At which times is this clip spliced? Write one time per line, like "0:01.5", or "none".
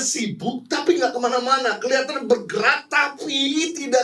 none